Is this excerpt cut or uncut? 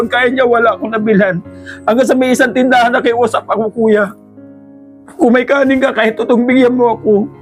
uncut